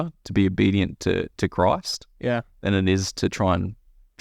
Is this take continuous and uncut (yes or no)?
yes